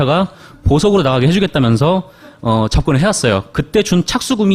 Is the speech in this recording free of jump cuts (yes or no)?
no